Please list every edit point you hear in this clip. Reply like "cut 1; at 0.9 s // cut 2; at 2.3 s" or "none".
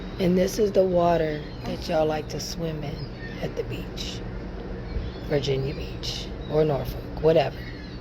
none